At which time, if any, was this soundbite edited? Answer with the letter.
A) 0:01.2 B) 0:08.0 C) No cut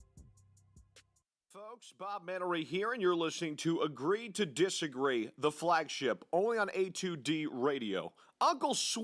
A